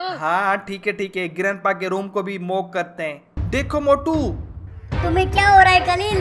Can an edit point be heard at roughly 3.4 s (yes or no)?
yes